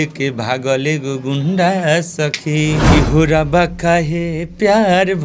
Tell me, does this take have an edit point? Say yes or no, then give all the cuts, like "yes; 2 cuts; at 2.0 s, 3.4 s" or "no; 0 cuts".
yes; 1 cut; at 2.9 s